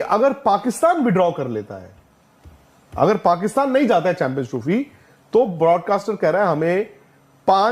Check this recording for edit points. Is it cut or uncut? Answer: uncut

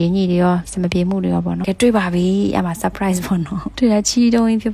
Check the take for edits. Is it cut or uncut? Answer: cut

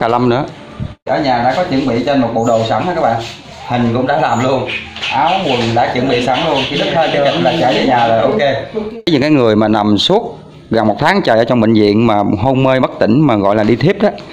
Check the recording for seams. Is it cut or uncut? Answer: cut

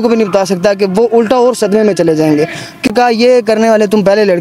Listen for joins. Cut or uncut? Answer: cut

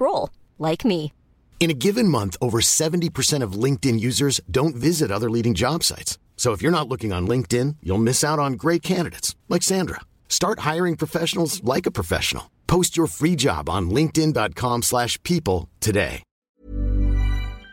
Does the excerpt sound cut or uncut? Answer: cut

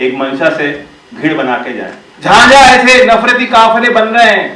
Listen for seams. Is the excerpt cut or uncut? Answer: cut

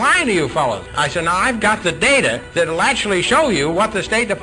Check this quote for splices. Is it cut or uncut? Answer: cut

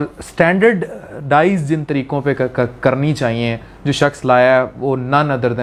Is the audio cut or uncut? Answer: uncut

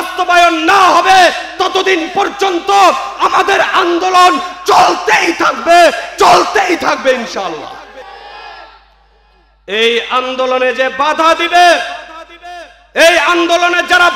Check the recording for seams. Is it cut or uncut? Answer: uncut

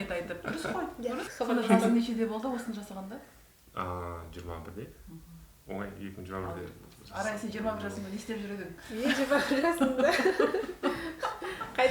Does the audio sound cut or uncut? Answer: cut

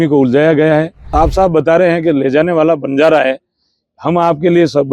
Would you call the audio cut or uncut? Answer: cut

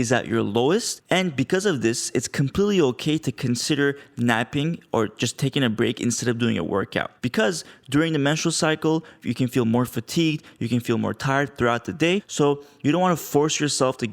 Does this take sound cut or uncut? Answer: cut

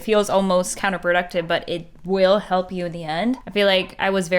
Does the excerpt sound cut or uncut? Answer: cut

